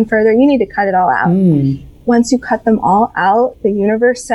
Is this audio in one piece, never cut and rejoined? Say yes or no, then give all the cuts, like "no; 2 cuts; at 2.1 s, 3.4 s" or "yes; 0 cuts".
no; 1 cut; at 1.8 s